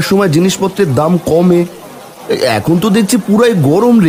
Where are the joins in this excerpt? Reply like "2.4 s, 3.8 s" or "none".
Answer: none